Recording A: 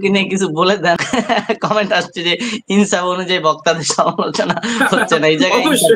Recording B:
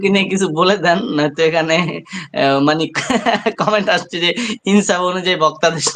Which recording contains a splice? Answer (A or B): A